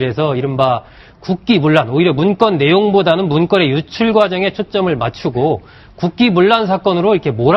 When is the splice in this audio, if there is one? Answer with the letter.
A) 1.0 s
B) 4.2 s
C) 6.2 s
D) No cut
C